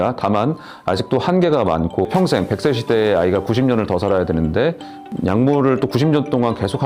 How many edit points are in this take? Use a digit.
1